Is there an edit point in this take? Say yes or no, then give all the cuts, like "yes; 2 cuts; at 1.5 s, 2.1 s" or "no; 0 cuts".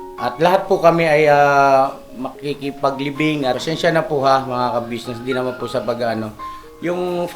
yes; 1 cut; at 3.6 s